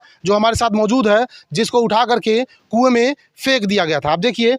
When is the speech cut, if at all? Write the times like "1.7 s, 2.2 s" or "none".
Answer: none